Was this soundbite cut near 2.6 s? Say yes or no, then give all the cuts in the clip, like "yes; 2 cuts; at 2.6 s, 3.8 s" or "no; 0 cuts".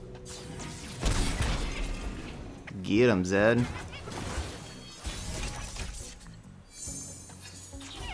yes; 1 cut; at 2.6 s